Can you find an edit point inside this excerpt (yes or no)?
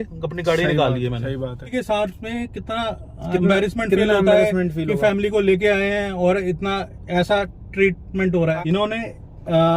yes